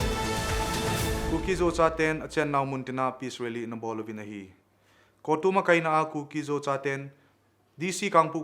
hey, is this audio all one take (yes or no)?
no